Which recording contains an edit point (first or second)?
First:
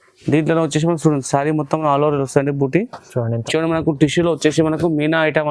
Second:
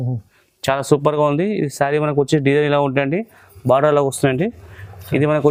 first